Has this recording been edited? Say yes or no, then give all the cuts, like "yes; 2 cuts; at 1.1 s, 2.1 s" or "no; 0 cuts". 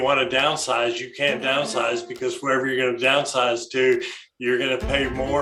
no; 0 cuts